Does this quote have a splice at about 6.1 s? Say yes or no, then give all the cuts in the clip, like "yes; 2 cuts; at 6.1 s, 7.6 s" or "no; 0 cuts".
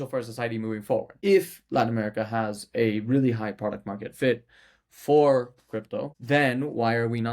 yes; 2 cuts; at 1.1 s, 6.1 s